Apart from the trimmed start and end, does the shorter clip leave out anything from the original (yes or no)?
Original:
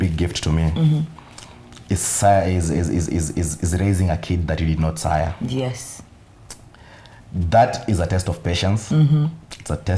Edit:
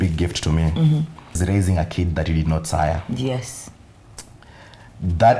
yes